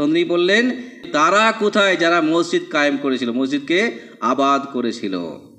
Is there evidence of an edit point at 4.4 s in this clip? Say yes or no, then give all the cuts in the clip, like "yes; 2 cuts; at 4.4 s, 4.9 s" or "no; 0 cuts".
no; 1 cut; at 1.0 s